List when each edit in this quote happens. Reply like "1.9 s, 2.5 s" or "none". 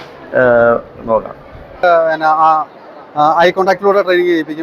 1.8 s

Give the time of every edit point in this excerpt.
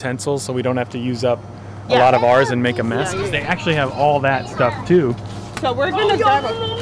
none

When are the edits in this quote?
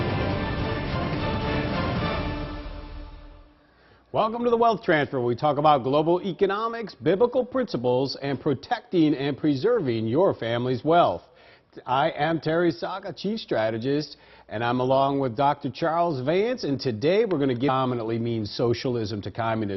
none

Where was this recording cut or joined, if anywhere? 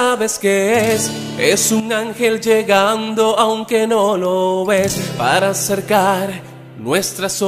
1.8 s

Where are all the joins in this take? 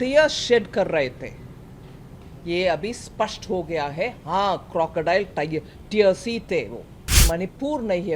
7.2 s

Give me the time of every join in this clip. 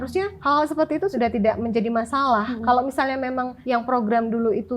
0.8 s, 3.5 s

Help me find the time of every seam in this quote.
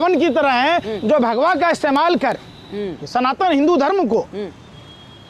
none

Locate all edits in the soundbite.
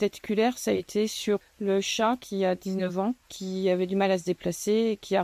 1.4 s, 3.4 s

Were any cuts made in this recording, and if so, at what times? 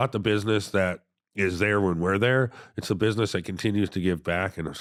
none

